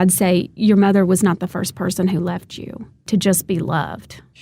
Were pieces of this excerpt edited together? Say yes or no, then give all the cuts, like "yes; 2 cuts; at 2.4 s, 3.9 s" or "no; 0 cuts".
yes; 1 cut; at 3.1 s